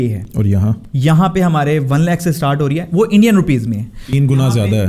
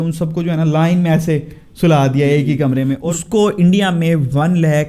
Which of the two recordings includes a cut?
second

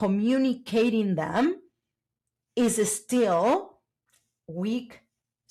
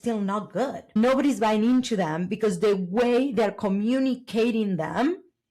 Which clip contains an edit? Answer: second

